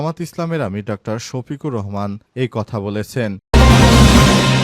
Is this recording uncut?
no; 1 cut; at 3.4 s

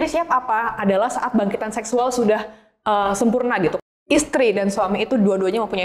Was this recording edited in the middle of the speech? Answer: yes; 1 cut; at 3.8 s

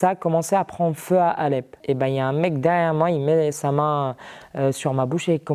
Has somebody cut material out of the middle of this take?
yes; 1 cut; at 1.7 s

